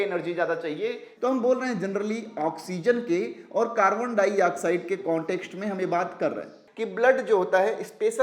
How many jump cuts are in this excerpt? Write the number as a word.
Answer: two